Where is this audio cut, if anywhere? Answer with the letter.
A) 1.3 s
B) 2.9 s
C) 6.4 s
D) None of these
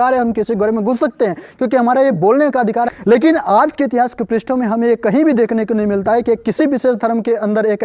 B